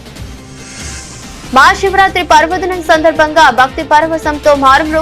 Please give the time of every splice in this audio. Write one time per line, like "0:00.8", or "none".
0:01.5